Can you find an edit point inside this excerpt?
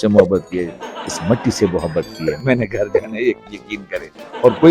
yes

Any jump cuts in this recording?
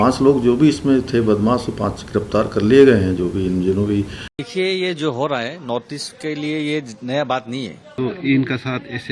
yes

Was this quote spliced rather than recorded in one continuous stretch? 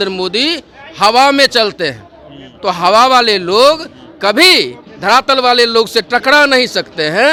no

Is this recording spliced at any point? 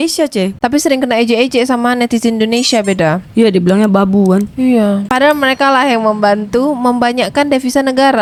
no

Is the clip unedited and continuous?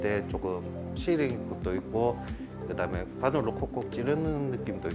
yes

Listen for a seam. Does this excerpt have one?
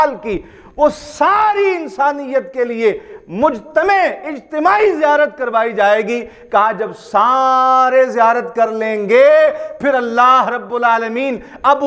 no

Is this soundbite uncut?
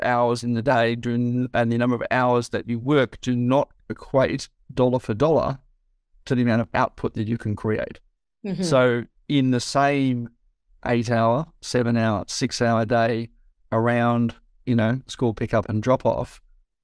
yes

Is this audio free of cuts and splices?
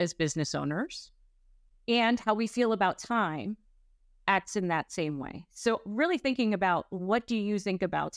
yes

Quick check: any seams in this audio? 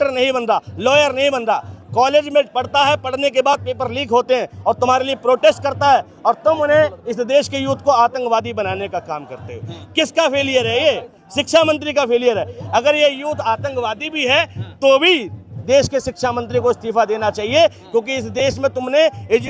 no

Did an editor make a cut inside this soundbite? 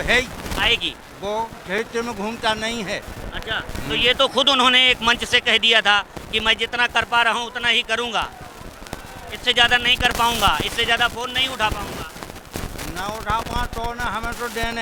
no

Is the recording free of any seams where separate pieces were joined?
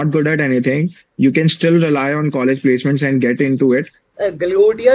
no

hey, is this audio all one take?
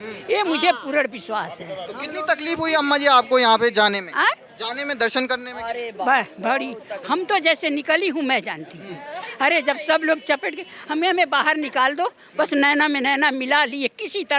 yes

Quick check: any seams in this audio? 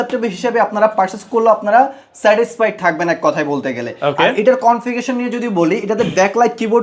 no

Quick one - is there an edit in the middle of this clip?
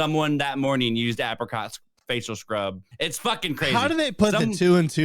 yes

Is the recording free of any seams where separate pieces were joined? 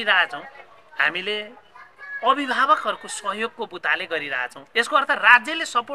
yes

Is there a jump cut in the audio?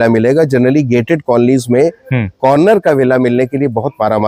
no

